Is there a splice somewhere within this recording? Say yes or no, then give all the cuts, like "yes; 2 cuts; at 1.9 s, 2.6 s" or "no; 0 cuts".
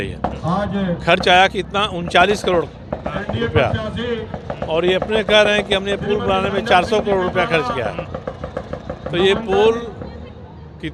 no; 0 cuts